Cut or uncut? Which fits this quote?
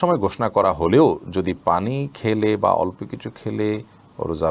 uncut